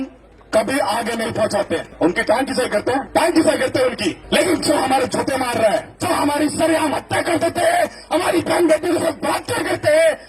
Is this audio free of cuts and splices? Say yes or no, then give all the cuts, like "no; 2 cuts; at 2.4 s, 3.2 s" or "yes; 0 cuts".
no; 4 cuts; at 1.9 s, 3.1 s, 4.2 s, 5.9 s